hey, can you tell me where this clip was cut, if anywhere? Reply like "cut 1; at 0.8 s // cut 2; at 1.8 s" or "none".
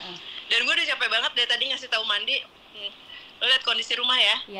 none